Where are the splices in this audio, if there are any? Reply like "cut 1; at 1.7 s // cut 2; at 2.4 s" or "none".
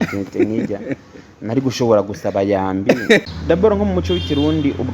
cut 1; at 3.2 s